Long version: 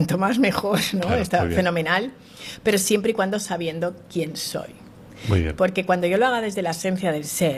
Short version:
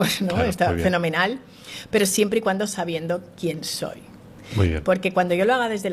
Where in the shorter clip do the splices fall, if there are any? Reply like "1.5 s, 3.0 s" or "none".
none